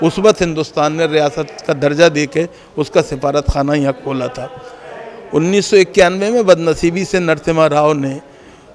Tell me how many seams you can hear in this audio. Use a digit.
0